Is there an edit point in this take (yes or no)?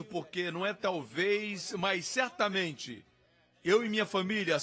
no